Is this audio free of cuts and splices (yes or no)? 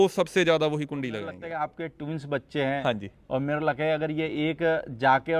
no